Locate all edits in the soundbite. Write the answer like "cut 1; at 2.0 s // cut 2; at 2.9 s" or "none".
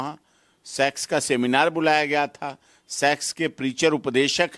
none